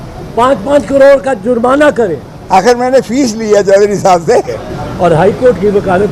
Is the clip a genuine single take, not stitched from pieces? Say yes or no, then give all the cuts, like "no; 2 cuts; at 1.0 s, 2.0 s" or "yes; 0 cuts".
no; 1 cut; at 4.7 s